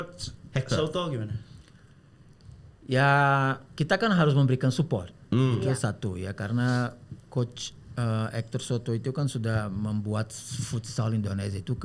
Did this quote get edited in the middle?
no; 0 cuts

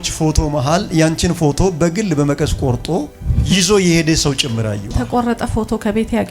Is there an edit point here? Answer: yes; 1 cut; at 4.9 s

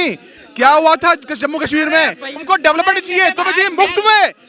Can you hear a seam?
yes; 1 cut; at 2.4 s

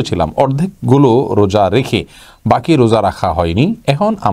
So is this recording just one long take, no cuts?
yes; 0 cuts

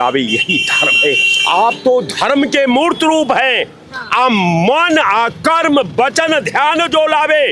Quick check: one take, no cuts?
yes; 0 cuts

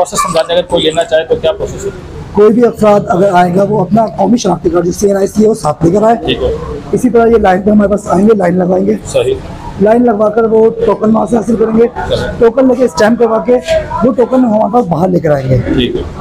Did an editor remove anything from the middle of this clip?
no; 0 cuts

